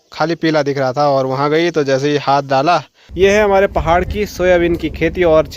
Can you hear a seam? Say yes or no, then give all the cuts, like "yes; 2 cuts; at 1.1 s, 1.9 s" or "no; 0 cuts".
yes; 1 cut; at 3.0 s